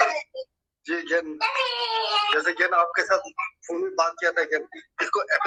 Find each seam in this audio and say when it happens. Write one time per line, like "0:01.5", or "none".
none